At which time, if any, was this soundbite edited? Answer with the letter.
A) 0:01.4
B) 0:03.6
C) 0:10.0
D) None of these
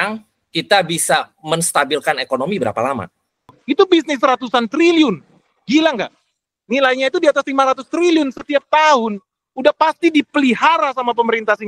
B